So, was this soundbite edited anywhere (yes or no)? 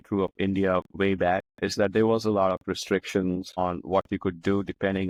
no